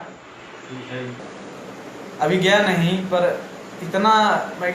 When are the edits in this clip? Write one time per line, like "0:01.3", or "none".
0:01.2